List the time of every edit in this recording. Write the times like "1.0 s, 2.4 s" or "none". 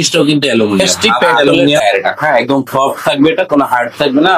1.8 s